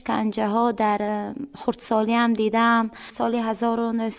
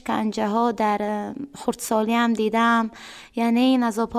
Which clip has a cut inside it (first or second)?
first